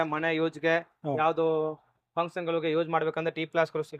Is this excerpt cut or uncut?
uncut